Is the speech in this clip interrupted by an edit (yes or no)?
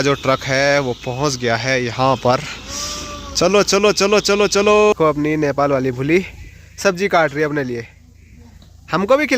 yes